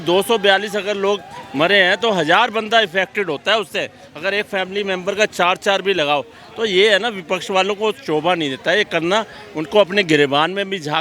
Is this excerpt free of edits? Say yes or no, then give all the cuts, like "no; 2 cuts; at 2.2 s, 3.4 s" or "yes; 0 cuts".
yes; 0 cuts